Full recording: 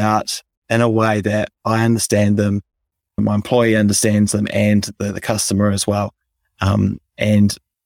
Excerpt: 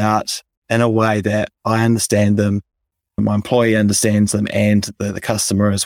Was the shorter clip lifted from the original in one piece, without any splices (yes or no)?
yes